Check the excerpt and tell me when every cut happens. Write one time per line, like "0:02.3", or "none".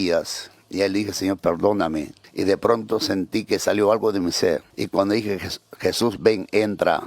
0:02.2
0:04.7